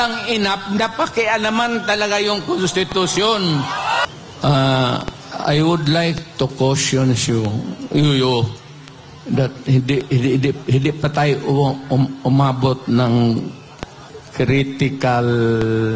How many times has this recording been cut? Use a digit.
1